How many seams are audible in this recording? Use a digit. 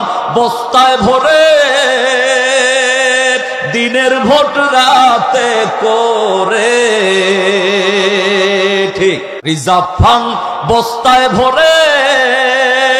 1